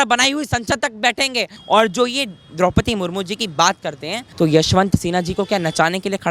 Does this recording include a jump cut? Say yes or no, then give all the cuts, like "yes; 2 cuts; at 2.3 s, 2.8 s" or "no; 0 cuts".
yes; 2 cuts; at 1.6 s, 4.2 s